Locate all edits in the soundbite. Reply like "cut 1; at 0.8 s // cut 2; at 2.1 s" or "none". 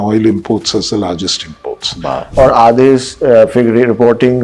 cut 1; at 2.2 s